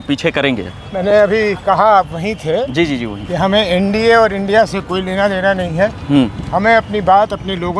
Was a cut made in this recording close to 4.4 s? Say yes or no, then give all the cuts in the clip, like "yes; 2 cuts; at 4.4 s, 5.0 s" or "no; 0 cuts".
no; 0 cuts